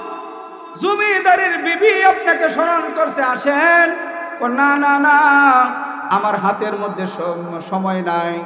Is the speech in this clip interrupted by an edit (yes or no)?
no